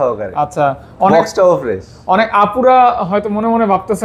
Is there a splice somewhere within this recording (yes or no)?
no